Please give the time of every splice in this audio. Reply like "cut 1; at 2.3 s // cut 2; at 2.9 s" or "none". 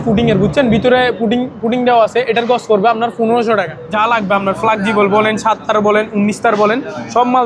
cut 1; at 3.8 s